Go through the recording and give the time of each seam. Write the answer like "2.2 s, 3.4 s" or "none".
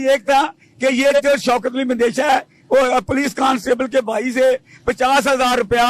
none

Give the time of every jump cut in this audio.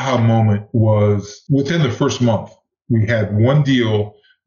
1.5 s

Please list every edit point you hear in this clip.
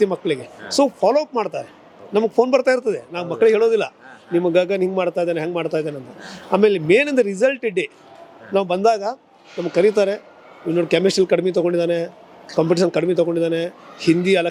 none

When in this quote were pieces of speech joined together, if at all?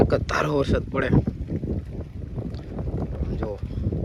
none

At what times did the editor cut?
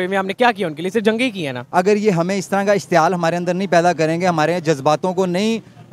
1.6 s

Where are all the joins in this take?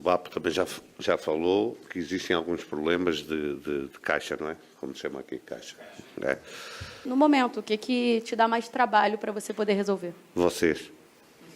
7.1 s

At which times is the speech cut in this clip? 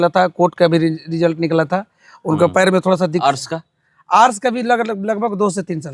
3.2 s

